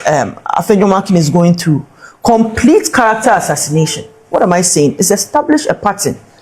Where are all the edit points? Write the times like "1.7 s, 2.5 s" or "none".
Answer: none